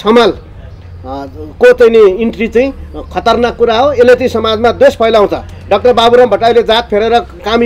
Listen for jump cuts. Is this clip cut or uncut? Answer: uncut